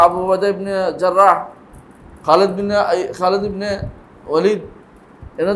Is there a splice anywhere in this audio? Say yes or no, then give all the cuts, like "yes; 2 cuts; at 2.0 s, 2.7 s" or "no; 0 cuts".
no; 0 cuts